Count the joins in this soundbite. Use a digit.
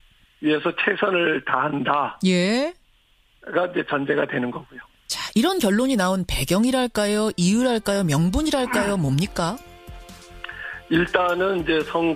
1